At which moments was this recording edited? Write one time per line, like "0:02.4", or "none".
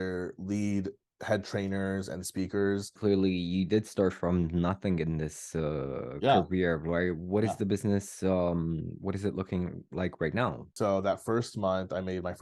0:03.0
0:10.7